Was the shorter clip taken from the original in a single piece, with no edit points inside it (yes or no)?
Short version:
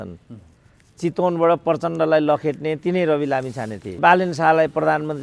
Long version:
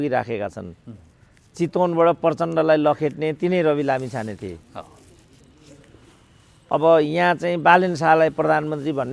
no